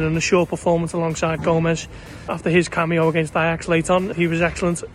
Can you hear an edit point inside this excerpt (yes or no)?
yes